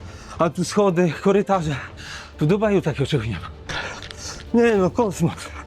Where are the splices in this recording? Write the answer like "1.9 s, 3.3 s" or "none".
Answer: 3.6 s